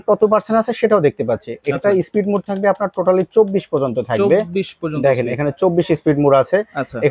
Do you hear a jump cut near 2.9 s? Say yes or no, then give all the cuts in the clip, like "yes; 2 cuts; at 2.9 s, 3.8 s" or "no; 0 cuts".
no; 0 cuts